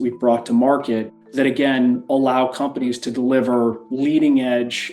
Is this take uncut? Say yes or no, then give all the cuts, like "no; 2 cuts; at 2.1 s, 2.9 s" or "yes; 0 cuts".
no; 1 cut; at 1.2 s